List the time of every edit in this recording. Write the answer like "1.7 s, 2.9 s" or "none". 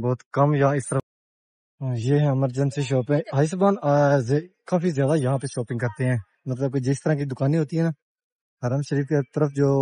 1.0 s